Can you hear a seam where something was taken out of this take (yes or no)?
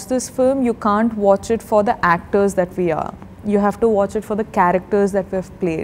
no